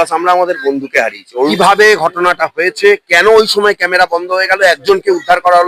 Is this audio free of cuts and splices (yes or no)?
no